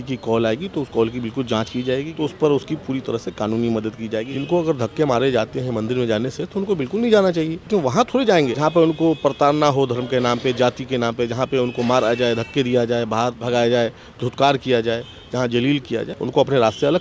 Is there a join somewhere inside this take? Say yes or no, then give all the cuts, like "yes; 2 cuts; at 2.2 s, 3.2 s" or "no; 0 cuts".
yes; 6 cuts; at 2.1 s, 4.3 s, 7.6 s, 8.5 s, 13.4 s, 16.1 s